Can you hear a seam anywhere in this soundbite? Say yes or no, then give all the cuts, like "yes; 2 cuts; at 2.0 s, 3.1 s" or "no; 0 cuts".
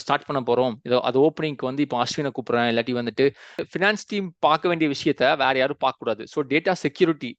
yes; 1 cut; at 3.7 s